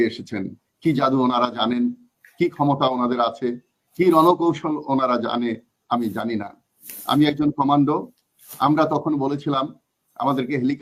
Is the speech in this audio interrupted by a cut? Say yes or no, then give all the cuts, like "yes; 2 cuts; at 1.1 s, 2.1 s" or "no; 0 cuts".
no; 0 cuts